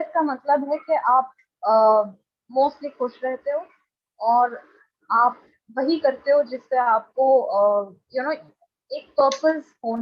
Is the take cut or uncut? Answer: uncut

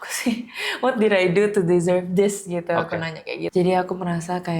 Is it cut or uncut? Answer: cut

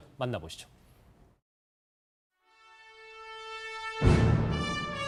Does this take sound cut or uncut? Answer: uncut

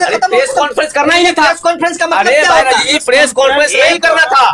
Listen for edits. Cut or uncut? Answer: uncut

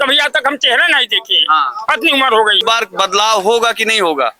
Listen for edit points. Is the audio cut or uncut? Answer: uncut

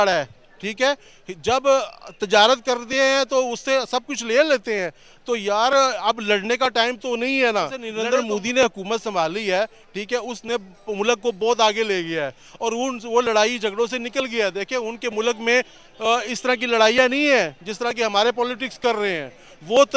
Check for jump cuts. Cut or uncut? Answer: cut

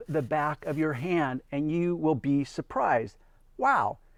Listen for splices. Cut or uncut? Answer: uncut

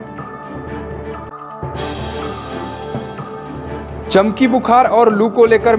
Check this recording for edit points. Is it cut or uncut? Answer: cut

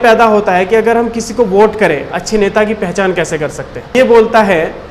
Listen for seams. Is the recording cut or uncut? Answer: cut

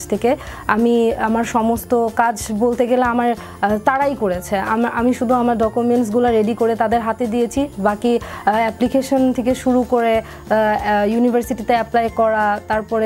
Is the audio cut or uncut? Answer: uncut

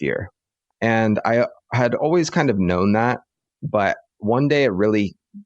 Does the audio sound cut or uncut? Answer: cut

